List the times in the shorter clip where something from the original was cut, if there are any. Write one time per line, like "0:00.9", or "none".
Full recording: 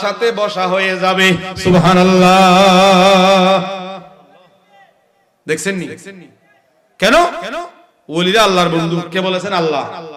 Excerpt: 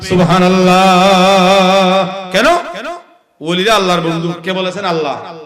0:02.2